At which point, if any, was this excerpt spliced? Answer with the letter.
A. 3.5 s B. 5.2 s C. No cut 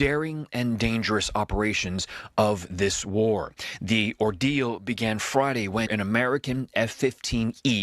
A